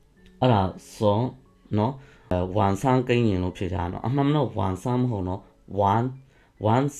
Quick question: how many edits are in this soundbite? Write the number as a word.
one